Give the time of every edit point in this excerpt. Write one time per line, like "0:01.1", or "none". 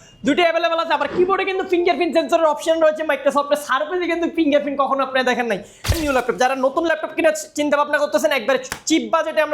0:05.9